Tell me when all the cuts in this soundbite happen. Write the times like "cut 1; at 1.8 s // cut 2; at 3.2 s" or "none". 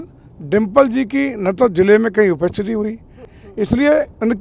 cut 1; at 3.2 s